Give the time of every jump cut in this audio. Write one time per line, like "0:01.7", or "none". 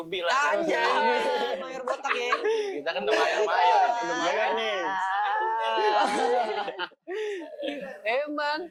none